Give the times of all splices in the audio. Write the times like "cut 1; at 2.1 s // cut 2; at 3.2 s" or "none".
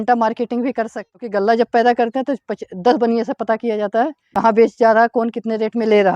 cut 1; at 1.1 s // cut 2; at 4.2 s